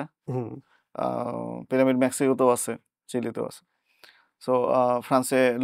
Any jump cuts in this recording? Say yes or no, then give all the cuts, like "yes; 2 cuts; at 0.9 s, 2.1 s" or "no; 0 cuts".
no; 0 cuts